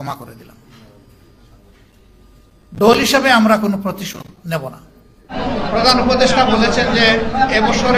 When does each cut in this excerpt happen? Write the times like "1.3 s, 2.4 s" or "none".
5.3 s